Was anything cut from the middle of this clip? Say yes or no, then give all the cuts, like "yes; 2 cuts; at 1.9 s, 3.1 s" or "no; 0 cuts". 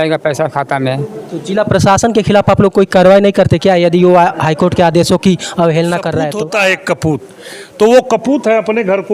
yes; 1 cut; at 6.3 s